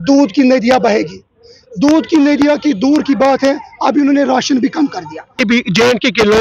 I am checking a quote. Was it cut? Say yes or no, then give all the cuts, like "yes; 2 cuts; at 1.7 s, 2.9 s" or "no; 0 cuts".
yes; 1 cut; at 5.4 s